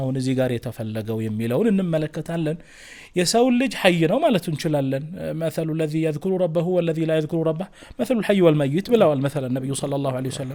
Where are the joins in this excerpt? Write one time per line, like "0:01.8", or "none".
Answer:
none